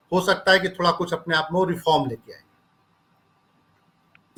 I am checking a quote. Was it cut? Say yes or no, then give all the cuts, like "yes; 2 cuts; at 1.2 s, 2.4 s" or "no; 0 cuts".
no; 0 cuts